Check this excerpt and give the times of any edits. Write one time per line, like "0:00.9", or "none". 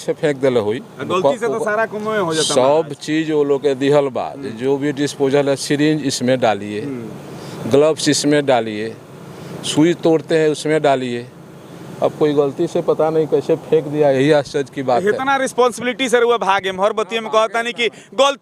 none